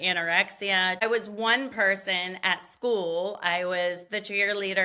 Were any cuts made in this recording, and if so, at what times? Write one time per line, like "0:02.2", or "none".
0:01.0